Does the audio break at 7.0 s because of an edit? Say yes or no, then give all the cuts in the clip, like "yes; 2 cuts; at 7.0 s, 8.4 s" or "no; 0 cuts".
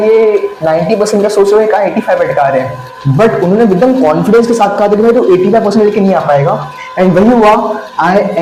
no; 0 cuts